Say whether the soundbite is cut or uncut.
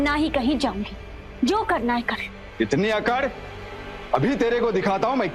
uncut